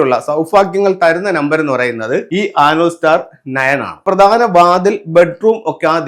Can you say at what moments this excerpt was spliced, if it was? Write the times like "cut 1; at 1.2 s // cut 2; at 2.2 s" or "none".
cut 1; at 2.3 s // cut 2; at 4.0 s